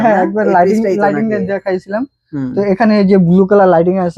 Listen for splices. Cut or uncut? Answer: uncut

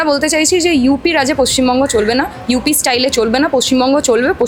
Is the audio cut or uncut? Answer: uncut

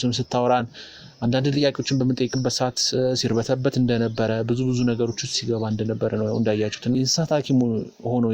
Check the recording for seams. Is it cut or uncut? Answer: cut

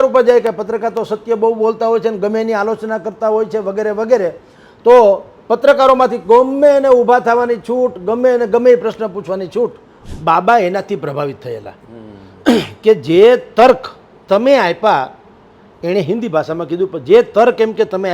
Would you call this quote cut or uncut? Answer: cut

